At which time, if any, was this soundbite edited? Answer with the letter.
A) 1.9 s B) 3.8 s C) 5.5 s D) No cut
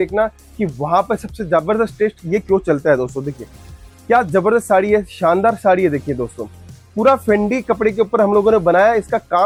D